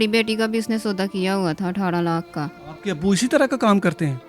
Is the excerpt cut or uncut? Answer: cut